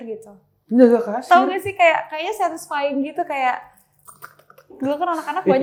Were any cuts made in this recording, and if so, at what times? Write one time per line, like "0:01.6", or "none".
none